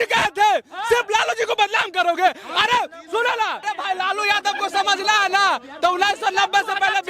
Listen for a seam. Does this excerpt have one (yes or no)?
yes